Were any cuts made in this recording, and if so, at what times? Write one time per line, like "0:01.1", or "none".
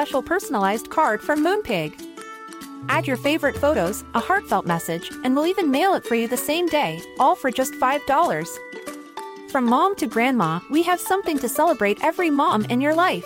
none